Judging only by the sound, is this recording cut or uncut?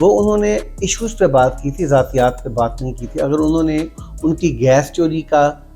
uncut